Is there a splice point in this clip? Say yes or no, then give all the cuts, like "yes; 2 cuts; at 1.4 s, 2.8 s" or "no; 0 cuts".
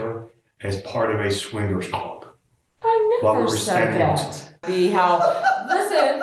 yes; 1 cut; at 4.6 s